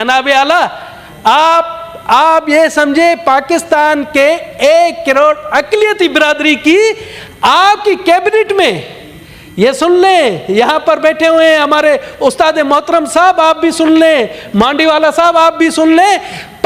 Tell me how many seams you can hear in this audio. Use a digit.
0